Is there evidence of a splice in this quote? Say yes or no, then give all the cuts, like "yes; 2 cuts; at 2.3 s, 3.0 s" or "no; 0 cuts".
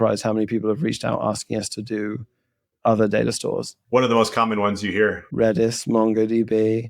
yes; 1 cut; at 3.8 s